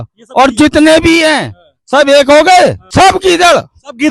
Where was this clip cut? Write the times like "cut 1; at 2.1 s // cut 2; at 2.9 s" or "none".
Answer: cut 1; at 2.8 s